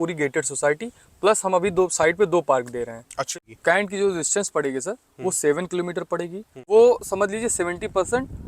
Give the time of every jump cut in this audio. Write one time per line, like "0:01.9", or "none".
0:03.2
0:06.6